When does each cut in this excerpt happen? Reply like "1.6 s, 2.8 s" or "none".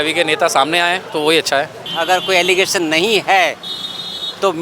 1.0 s, 1.8 s